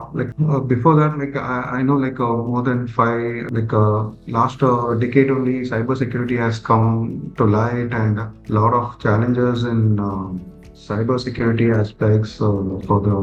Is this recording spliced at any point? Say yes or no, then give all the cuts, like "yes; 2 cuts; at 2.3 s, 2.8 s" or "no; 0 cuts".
no; 0 cuts